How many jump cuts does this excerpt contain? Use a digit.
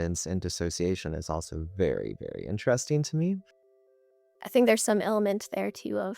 1